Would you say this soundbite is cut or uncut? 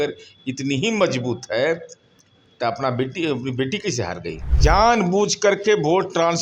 cut